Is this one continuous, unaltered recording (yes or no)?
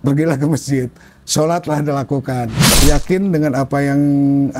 no